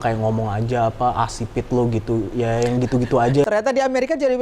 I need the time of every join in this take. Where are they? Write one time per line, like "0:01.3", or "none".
0:03.5